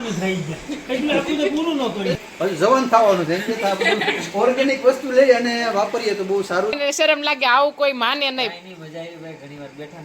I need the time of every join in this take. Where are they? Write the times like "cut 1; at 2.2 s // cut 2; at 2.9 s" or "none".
cut 1; at 2.2 s // cut 2; at 6.8 s